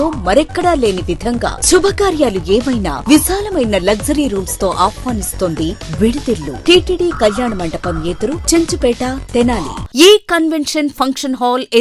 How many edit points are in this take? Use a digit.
2